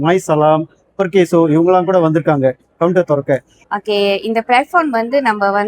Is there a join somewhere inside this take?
yes; 1 cut; at 3.6 s

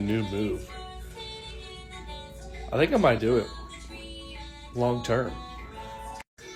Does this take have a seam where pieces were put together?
no; 0 cuts

